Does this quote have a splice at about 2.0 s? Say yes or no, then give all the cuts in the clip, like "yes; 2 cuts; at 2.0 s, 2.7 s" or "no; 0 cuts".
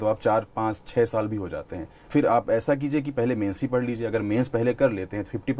yes; 1 cut; at 2.0 s